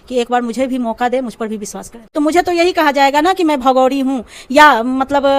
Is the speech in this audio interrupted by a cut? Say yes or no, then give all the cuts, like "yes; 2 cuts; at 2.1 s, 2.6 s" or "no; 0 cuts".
no; 0 cuts